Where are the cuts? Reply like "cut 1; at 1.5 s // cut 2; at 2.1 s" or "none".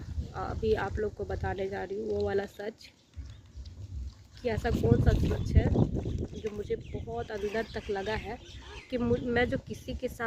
none